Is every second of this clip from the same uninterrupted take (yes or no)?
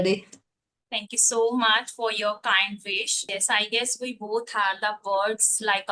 no